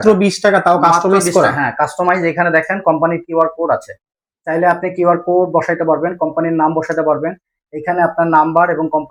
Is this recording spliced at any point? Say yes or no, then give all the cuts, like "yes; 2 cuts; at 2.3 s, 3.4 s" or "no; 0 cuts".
no; 0 cuts